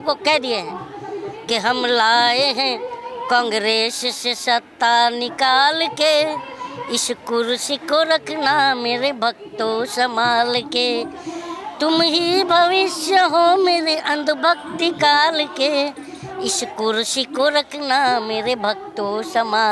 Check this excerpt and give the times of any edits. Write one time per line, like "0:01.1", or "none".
none